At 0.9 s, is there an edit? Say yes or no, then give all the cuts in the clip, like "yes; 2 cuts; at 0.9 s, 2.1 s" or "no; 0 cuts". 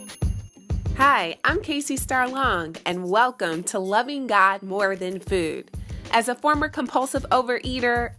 yes; 1 cut; at 0.9 s